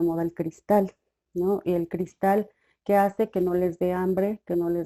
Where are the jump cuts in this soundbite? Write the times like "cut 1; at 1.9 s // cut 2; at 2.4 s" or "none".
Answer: none